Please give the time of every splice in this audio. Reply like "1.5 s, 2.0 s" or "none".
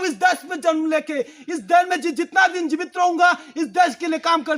none